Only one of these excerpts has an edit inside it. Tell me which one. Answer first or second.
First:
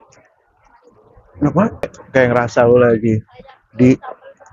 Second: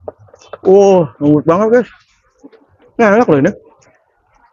first